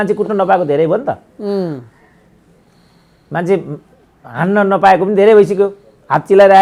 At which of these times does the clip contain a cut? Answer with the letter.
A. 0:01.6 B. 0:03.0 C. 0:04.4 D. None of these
D